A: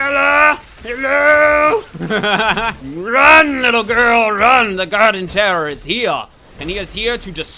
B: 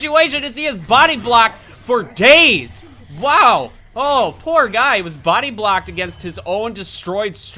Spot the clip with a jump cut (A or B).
A